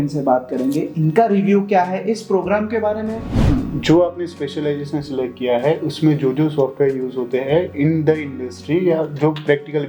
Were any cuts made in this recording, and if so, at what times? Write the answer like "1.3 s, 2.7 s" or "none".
3.3 s